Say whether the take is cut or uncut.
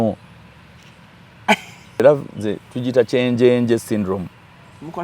cut